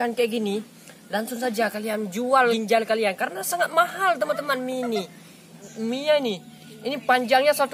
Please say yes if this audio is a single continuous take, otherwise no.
no